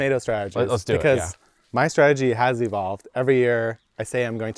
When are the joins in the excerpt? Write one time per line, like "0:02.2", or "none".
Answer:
none